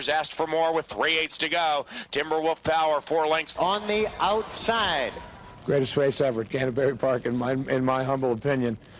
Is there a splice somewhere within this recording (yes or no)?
yes